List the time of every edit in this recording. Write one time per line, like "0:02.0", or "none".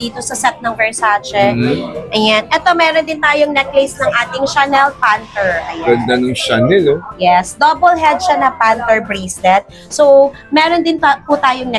none